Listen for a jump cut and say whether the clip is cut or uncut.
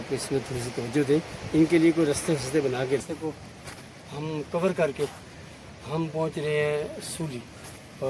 cut